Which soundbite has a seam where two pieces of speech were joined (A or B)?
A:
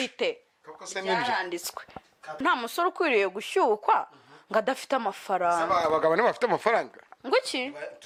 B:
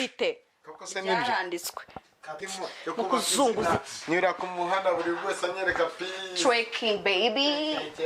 B